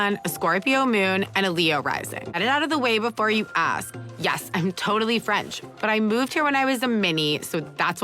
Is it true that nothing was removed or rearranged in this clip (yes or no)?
no